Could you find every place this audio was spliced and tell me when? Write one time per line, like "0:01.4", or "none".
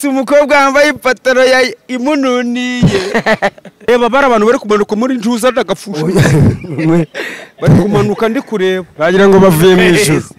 0:03.8